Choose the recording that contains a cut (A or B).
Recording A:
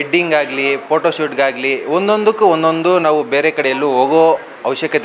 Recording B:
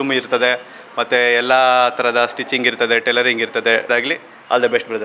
B